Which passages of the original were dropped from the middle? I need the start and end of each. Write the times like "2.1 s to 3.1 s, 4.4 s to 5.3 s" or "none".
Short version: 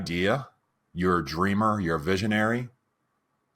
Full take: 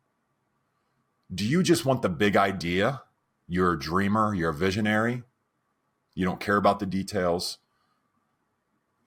none